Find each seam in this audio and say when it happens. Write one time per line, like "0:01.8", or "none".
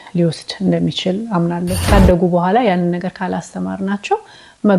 0:01.9